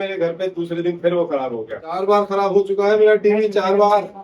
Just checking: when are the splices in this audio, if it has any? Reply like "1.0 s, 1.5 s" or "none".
2.0 s